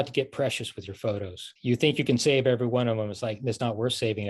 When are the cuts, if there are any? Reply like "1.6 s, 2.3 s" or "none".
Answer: 1.5 s